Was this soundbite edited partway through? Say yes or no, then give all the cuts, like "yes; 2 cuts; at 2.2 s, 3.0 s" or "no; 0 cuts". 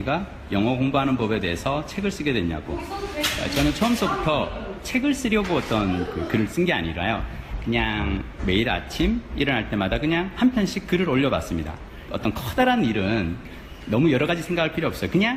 no; 0 cuts